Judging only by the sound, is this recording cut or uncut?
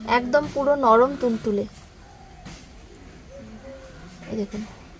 uncut